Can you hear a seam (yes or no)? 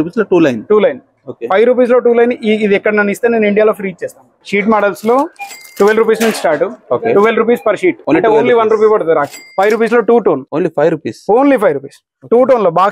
yes